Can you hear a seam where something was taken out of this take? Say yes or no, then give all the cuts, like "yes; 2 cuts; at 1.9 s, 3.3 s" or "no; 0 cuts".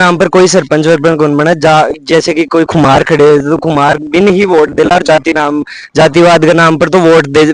no; 0 cuts